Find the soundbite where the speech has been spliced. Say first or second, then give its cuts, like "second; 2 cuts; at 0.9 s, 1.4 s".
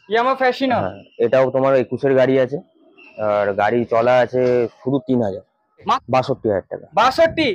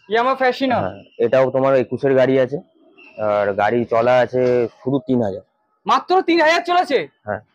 first; 1 cut; at 6.0 s